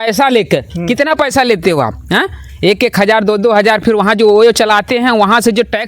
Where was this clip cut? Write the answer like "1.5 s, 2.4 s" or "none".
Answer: none